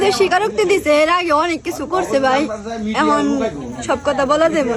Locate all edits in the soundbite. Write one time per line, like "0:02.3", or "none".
none